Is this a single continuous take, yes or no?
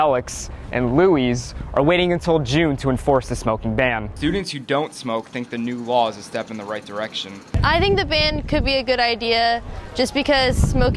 yes